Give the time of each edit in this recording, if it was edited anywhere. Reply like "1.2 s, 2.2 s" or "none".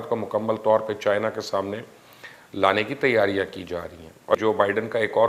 3.9 s